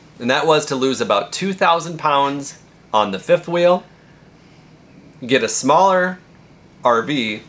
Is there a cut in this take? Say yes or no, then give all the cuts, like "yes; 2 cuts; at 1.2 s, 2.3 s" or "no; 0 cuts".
no; 0 cuts